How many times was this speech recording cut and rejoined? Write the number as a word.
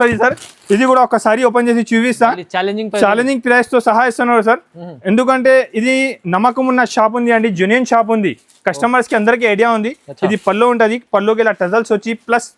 zero